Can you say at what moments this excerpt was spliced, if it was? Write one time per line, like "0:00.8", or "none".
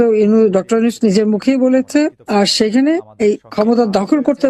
0:02.2
0:03.4